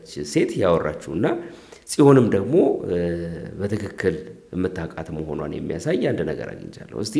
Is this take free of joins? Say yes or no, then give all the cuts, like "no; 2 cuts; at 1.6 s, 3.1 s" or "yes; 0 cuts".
yes; 0 cuts